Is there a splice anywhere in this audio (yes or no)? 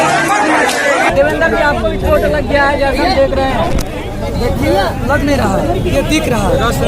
yes